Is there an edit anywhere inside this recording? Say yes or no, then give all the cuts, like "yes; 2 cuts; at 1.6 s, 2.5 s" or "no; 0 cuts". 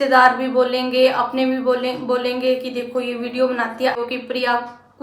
yes; 1 cut; at 4.0 s